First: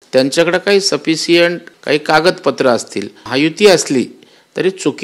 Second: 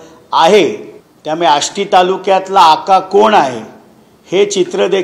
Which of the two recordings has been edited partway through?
first; 2 cuts; at 1.7 s, 3.2 s

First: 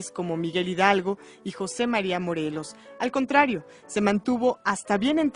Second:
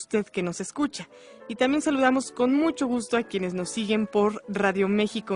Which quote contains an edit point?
first; 1 cut; at 0.9 s

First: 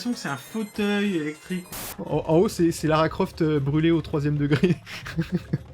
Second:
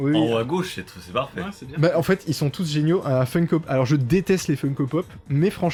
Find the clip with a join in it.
first; 1 cut; at 1.8 s

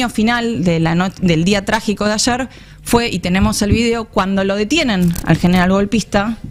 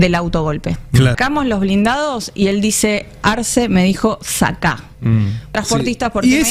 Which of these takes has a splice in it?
second; 2 cuts; at 1.2 s, 5.5 s

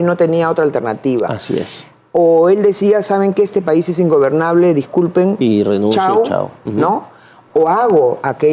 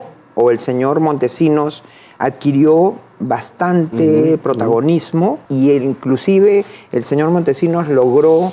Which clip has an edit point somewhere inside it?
second; 1 cut; at 5.4 s

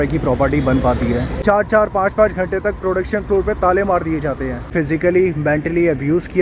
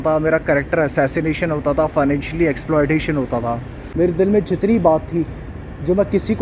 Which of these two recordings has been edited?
first; 2 cuts; at 1.3 s, 4.7 s

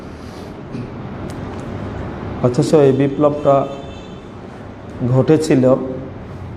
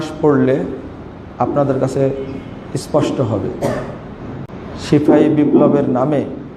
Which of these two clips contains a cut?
second; 1 cut; at 4.4 s

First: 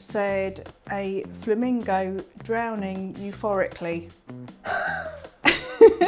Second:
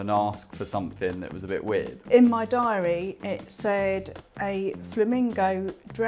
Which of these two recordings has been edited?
second; 1 cut; at 2.0 s

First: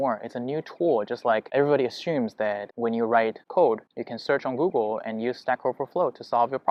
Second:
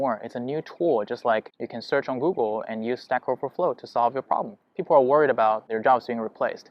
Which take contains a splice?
second; 2 cuts; at 1.5 s, 4.6 s

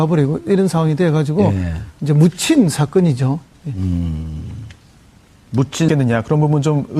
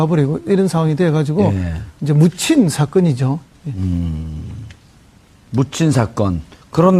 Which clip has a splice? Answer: second; 1 cut; at 5.9 s

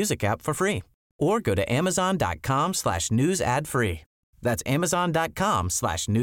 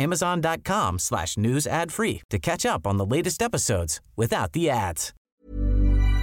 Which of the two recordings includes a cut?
second; 1 cut; at 5.1 s

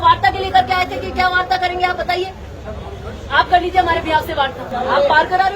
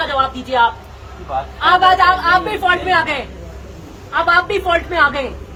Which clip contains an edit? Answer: first; 1 cut; at 4.7 s

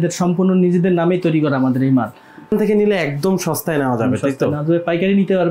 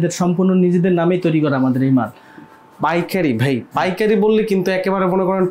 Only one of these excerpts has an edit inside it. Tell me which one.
first; 1 cut; at 2.5 s

